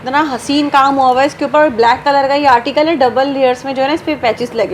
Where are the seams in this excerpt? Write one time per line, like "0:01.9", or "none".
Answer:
none